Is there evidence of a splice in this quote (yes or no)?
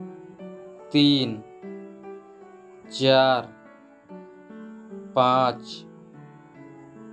yes